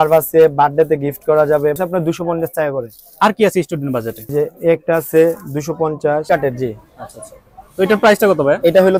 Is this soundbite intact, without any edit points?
no; 3 cuts; at 1.8 s, 4.2 s, 6.2 s

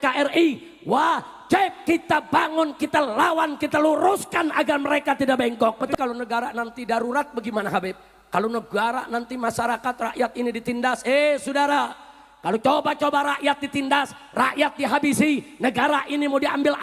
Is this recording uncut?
no; 1 cut; at 5.9 s

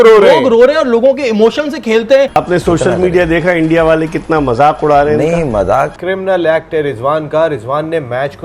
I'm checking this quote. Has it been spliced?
yes; 2 cuts; at 2.3 s, 6.0 s

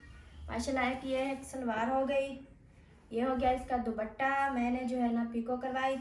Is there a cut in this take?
no; 0 cuts

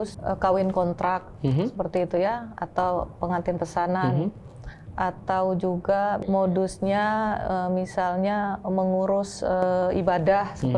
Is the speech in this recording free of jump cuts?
yes; 0 cuts

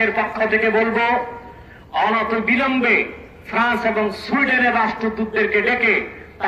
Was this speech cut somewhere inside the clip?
no; 0 cuts

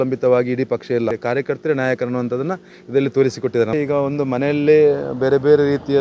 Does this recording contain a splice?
yes; 2 cuts; at 1.2 s, 3.7 s

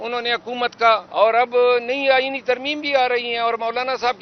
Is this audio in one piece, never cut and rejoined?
no; 1 cut; at 1.1 s

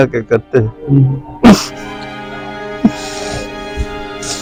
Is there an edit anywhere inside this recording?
no; 0 cuts

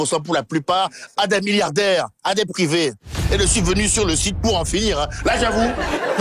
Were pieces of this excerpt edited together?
yes; 1 cut; at 3.2 s

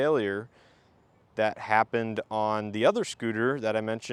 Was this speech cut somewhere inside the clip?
no; 0 cuts

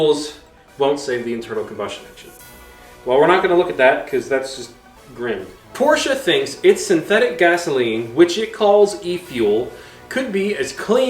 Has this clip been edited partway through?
yes; 1 cut; at 5.6 s

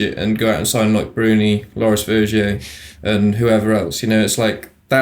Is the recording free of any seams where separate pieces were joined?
yes; 0 cuts

